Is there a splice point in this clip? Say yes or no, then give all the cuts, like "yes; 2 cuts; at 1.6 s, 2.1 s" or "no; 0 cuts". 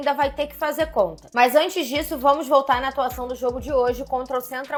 no; 0 cuts